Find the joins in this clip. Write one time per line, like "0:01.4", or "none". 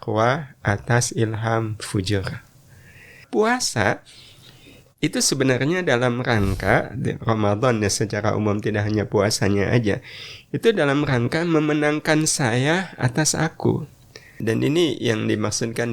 0:03.2
0:14.4